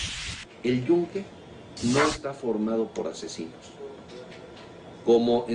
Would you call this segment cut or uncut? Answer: uncut